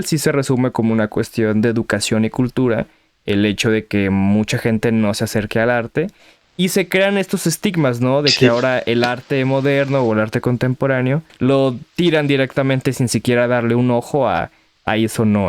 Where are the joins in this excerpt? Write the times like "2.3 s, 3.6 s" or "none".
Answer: 11.3 s